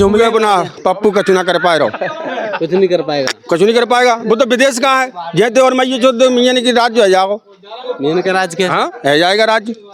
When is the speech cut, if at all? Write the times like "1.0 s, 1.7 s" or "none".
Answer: none